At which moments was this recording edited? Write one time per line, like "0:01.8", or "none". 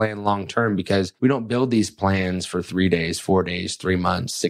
0:01.1